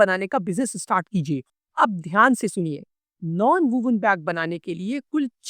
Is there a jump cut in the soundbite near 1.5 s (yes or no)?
yes